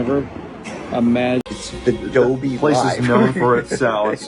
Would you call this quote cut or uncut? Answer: cut